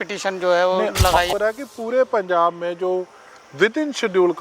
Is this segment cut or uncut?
cut